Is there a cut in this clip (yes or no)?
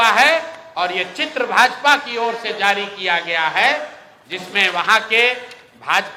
no